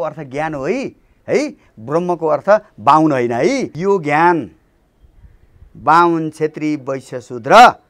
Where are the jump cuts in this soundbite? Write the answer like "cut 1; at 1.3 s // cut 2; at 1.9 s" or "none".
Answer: cut 1; at 3.7 s